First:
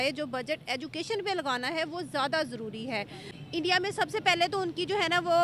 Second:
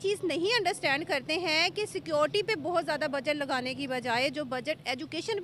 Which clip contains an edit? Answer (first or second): first